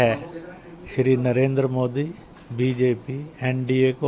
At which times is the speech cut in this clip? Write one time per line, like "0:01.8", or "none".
none